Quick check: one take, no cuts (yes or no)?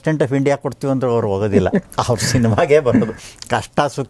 yes